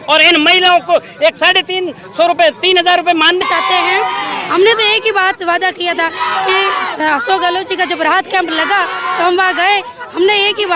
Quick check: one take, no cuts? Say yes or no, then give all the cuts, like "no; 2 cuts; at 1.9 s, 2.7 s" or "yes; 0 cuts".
no; 1 cut; at 3.4 s